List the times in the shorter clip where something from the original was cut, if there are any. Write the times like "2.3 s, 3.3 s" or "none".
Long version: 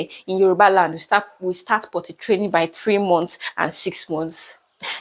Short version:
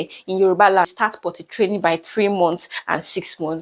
0.9 s